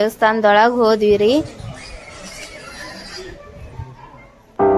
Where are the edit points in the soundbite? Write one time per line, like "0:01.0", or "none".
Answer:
none